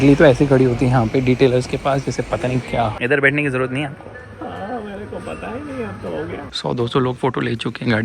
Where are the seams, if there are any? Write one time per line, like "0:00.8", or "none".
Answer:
0:02.9
0:06.4